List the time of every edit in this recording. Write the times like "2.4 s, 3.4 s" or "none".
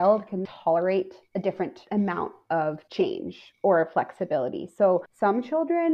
1.8 s, 2.8 s, 5.1 s